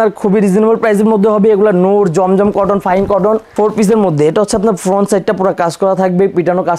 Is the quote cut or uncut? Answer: cut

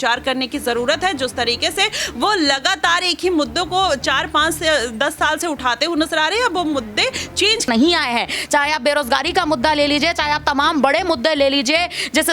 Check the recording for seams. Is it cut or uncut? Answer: cut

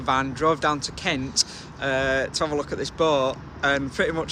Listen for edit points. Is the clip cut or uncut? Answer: uncut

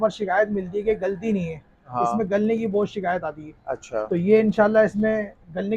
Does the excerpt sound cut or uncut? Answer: uncut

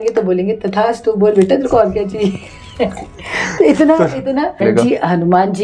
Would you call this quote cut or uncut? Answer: cut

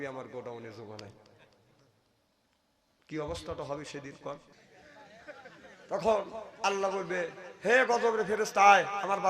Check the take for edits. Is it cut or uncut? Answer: cut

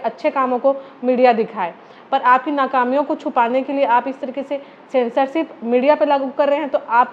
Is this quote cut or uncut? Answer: uncut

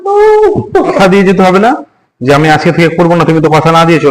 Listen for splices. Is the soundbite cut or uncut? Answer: cut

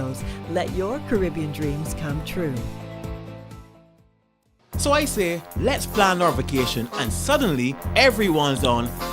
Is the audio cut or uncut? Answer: cut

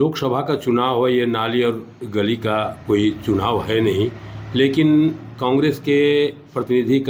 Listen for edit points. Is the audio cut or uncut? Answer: uncut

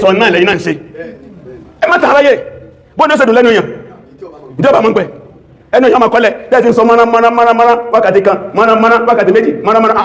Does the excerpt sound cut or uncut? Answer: uncut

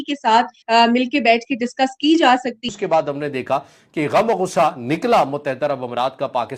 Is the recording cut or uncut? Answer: cut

